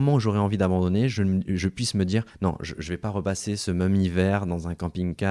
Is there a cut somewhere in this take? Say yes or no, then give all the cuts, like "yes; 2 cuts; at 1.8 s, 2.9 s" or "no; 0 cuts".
no; 0 cuts